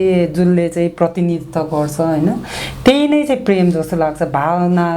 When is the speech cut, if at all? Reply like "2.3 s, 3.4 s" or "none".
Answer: none